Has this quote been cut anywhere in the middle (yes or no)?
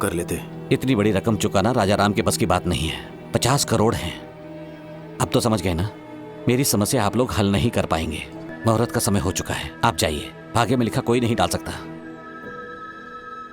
yes